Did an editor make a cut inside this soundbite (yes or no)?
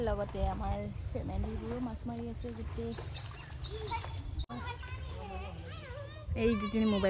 yes